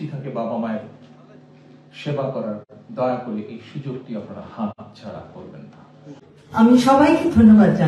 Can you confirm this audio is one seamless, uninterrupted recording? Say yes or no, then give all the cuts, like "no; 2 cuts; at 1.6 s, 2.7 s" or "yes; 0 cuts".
no; 1 cut; at 6.2 s